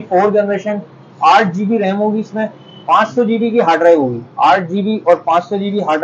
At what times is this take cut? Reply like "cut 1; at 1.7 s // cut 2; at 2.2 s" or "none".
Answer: none